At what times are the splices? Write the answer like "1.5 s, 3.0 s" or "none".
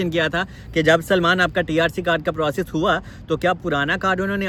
none